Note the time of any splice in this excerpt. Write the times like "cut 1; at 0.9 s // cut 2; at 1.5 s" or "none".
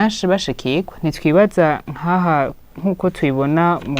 none